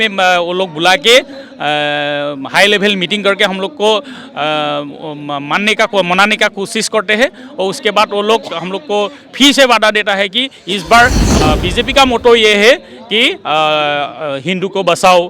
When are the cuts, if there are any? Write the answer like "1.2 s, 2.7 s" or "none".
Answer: 11.3 s